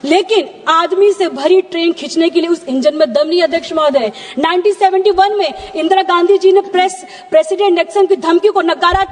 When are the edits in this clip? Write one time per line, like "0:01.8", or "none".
0:01.7
0:04.2